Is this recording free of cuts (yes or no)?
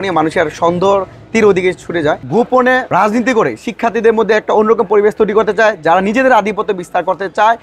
no